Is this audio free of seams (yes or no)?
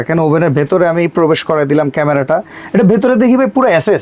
yes